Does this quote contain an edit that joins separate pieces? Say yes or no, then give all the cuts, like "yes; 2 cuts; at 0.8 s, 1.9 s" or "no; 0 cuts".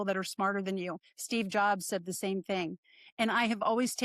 no; 0 cuts